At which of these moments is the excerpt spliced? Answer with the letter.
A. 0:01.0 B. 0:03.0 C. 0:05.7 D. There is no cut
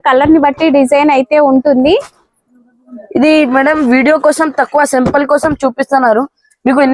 D